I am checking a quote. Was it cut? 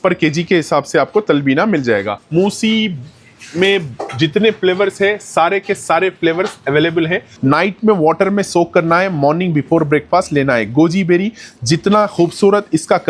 yes; 2 cuts; at 2.2 s, 7.3 s

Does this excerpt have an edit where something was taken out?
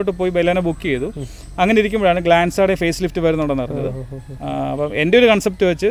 no; 0 cuts

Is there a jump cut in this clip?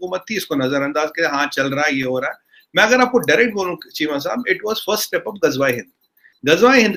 no; 0 cuts

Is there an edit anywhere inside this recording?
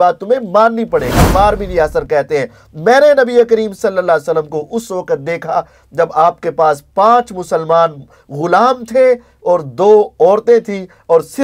yes; 1 cut; at 1.2 s

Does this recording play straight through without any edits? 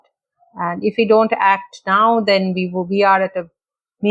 yes; 0 cuts

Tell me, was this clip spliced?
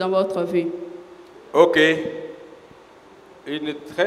no; 0 cuts

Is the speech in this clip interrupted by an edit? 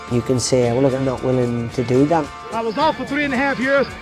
yes; 2 cuts; at 1.0 s, 2.3 s

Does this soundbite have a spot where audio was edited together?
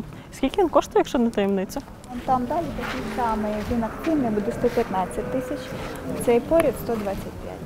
yes; 1 cut; at 2.2 s

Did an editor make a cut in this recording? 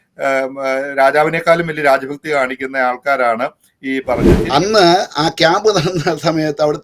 yes; 1 cut; at 4.3 s

